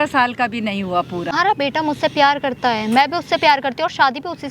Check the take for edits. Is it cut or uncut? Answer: cut